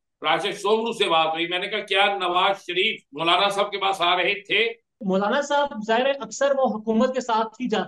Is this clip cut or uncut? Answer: cut